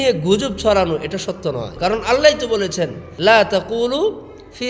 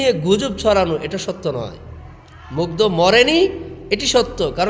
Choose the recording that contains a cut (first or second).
first